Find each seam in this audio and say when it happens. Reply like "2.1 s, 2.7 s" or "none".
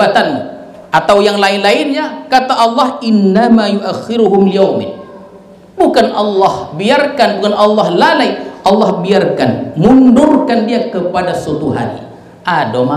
none